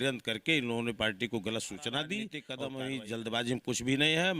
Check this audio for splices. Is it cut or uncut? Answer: cut